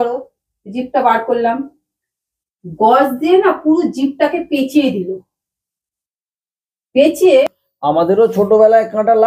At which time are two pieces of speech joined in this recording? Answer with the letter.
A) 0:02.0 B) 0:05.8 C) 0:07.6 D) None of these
C